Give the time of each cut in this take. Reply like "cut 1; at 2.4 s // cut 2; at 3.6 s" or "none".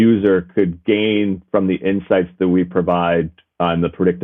none